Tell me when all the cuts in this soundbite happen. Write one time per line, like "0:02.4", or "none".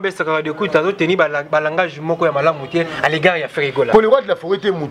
0:03.9

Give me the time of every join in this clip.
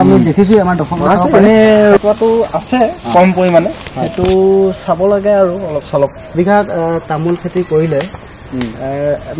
0:02.0
0:06.3

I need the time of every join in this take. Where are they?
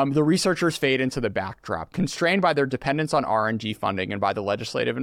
none

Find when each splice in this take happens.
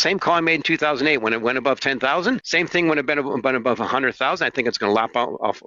0:02.5

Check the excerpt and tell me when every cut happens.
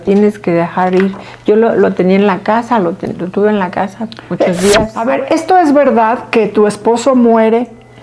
0:04.9

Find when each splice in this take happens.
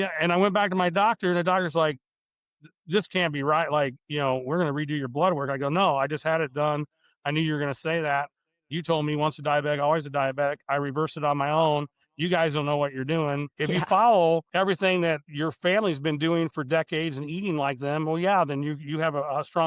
0:13.5
0:14.5
0:15.3

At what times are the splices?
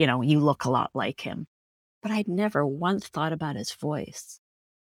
none

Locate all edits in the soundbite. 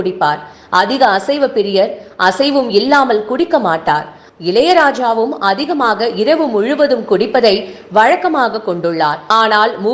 0:04.2

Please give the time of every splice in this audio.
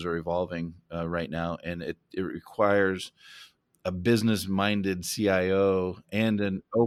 none

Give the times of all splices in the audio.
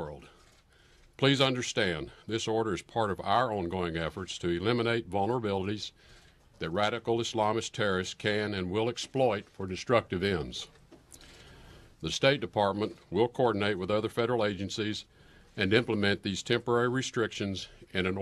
none

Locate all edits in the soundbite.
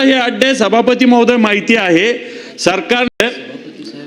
0:03.1

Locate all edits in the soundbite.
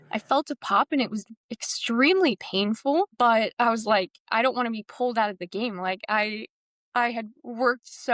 none

